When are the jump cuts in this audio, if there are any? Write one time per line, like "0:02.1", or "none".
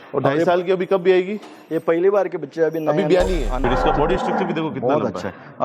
0:03.6